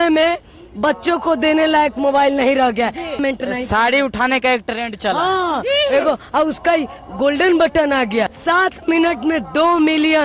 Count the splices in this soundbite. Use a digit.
2